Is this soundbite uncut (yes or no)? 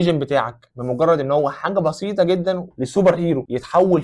no